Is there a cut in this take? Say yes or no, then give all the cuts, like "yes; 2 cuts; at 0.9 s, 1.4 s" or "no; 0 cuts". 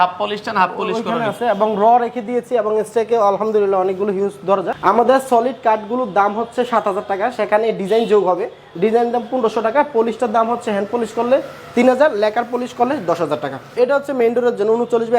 yes; 2 cuts; at 4.7 s, 13.8 s